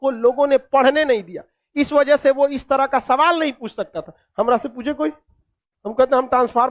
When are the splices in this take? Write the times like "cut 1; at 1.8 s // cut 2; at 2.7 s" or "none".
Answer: none